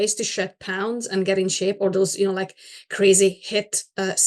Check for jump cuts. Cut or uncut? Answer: uncut